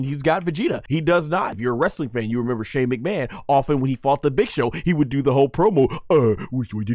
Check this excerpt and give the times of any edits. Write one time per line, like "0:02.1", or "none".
0:00.8
0:01.6